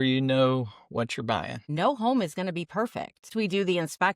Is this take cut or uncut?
cut